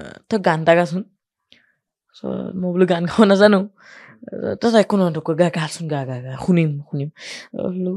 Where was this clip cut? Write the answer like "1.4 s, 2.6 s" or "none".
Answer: none